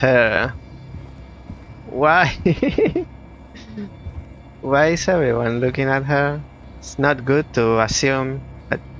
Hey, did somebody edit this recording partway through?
no; 0 cuts

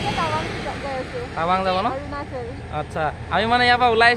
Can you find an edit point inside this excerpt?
no; 0 cuts

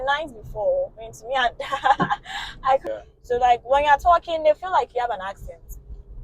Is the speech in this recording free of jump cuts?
no; 1 cut; at 2.8 s

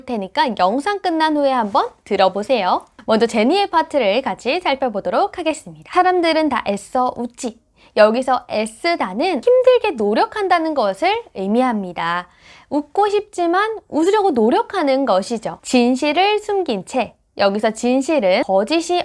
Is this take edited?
yes; 1 cut; at 2.9 s

